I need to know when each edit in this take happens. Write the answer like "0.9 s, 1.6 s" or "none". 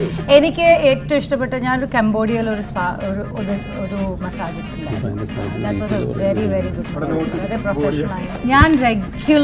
8.2 s